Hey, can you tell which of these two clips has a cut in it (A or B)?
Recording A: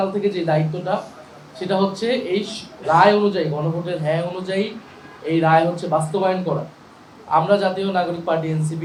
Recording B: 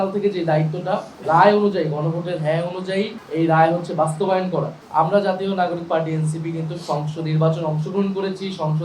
B